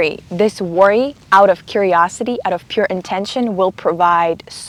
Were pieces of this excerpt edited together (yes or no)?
no